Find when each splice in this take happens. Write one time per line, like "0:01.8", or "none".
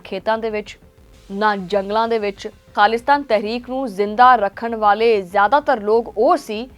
0:02.7